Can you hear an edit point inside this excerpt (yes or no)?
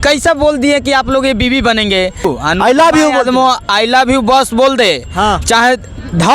yes